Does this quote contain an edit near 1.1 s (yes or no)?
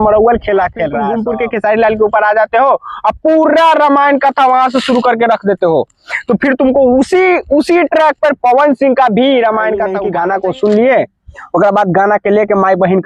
yes